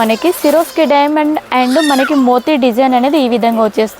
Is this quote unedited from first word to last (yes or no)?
yes